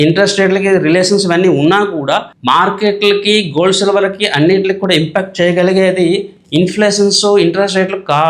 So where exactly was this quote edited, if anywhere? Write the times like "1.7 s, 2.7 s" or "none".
none